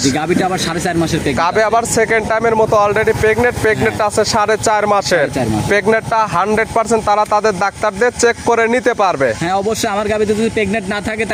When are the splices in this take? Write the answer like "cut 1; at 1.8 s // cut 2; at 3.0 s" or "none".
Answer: none

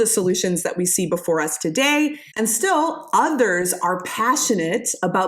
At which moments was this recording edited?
cut 1; at 2.2 s

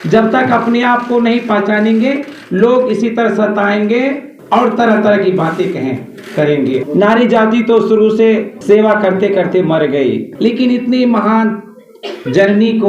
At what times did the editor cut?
cut 1; at 4.3 s // cut 2; at 6.8 s // cut 3; at 8.5 s // cut 4; at 10.3 s

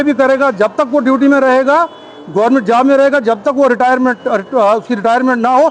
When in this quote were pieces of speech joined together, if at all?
none

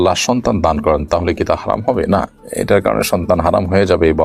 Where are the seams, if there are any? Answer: none

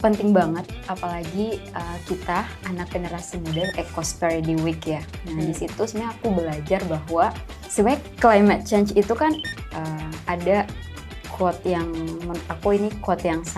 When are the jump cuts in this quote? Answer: cut 1; at 3.7 s // cut 2; at 7.6 s // cut 3; at 9.4 s

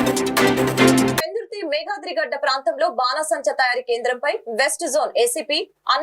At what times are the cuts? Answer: cut 1; at 1.2 s

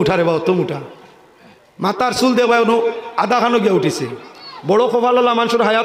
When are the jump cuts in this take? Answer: cut 1; at 4.5 s

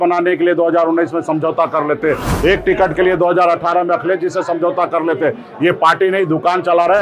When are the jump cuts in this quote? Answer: none

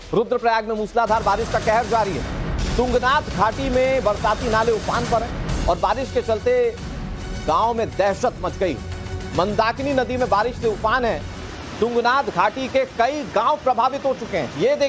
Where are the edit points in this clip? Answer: none

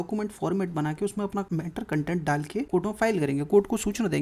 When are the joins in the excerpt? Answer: cut 1; at 1.5 s // cut 2; at 2.7 s

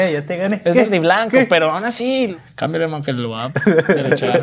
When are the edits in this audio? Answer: cut 1; at 2.3 s

